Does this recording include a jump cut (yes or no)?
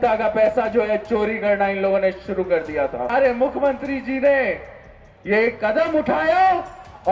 yes